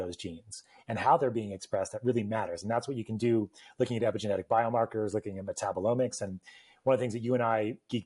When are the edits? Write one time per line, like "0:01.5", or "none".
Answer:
none